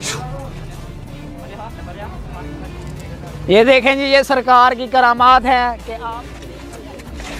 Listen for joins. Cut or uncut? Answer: uncut